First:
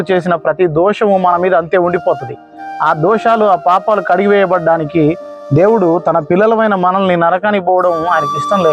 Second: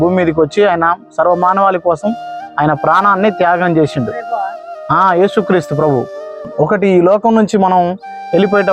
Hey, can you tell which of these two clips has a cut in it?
second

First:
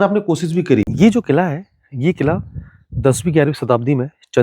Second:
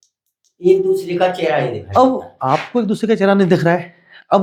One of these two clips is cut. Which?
first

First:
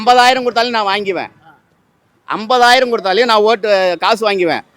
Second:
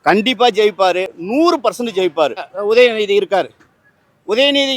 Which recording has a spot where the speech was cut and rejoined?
second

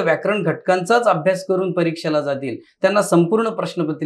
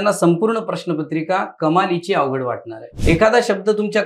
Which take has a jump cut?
second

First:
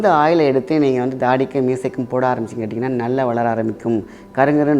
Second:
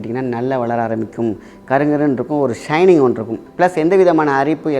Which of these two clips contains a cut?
second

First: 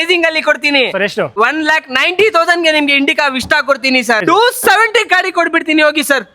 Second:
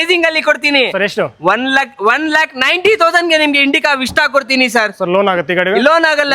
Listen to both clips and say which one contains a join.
first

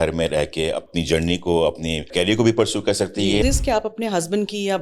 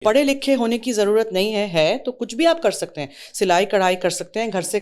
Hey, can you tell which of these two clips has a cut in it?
first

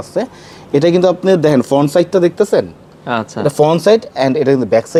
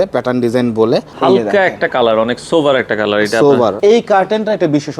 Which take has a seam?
second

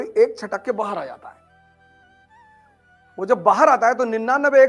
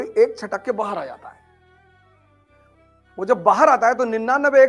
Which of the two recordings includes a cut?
second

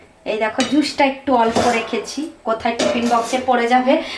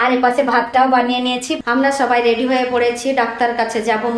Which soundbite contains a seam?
second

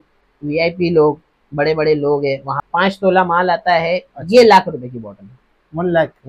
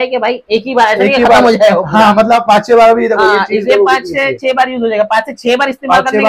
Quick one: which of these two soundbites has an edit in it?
first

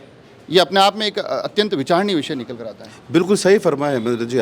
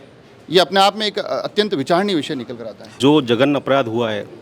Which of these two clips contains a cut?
second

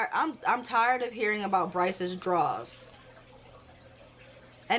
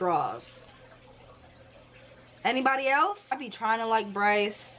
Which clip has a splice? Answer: second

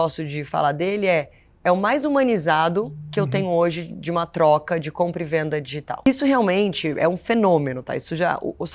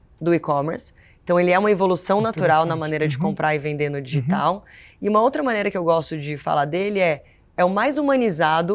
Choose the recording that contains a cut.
first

